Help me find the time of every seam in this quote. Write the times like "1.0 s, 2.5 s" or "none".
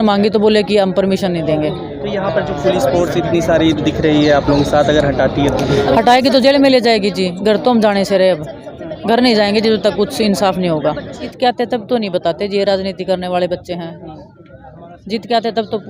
11.3 s